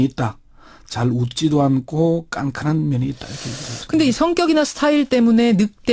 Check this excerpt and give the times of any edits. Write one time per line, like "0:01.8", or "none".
0:03.7

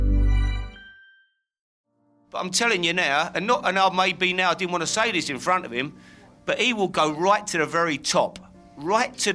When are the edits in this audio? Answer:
0:01.8

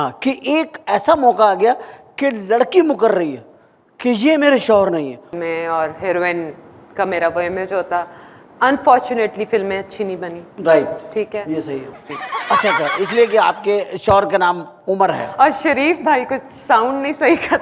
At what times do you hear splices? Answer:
0:05.3
0:12.0

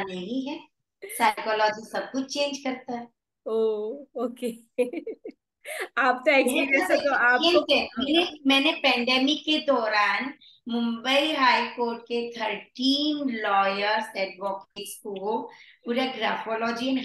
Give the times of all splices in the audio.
none

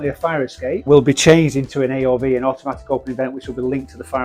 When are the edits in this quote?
none

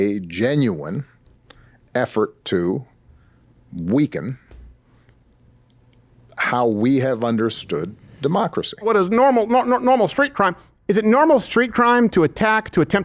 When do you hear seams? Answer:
0:08.8

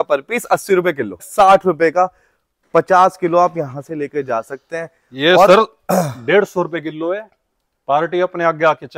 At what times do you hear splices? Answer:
0:01.3

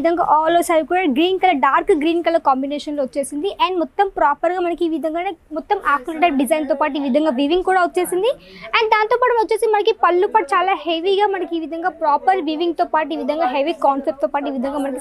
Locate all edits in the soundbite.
none

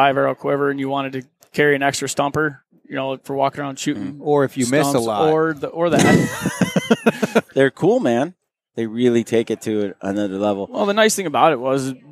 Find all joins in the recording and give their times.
0:07.5

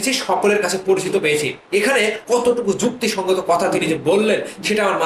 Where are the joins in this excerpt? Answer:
none

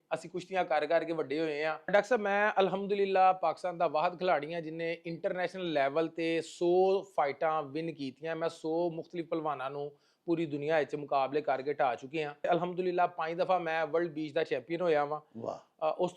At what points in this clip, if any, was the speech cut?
0:01.8
0:12.5

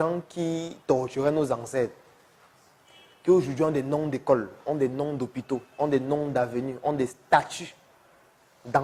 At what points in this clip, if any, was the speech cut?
none

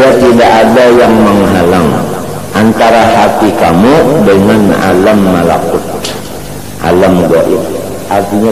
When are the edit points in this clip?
none

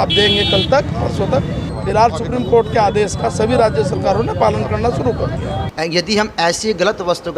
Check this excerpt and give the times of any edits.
0:01.7
0:05.7

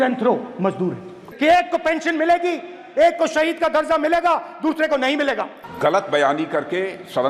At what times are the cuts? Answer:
none

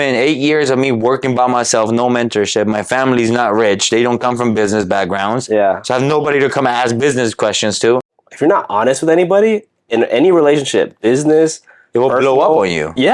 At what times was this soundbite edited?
0:08.2

